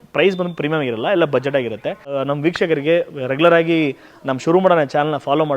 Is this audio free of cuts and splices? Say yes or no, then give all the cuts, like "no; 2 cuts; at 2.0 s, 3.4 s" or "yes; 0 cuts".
no; 1 cut; at 2.1 s